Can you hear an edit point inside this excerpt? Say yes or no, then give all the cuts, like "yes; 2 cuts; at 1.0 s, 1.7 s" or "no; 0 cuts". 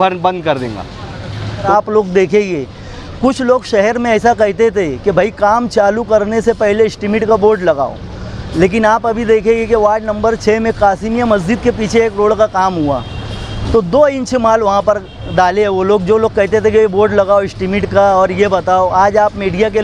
yes; 1 cut; at 1.7 s